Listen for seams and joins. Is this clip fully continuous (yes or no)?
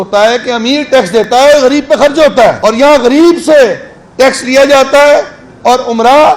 no